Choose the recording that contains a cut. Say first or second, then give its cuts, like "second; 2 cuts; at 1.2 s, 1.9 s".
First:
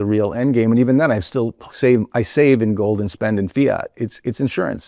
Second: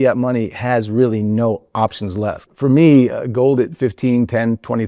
second; 1 cut; at 2.5 s